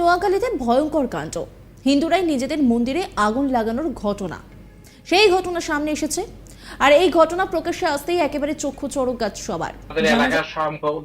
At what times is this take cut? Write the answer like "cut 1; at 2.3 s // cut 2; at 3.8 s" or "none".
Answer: cut 1; at 9.9 s